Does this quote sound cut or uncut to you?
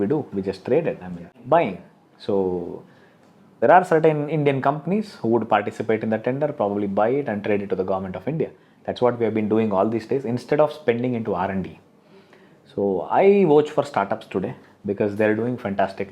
cut